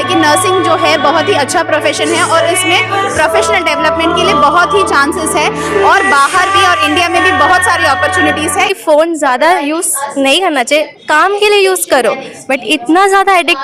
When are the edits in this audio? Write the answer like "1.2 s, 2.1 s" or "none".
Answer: 8.7 s